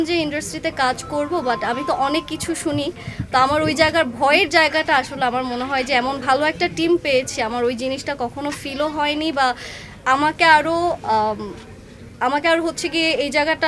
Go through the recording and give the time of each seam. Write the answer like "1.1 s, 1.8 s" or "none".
none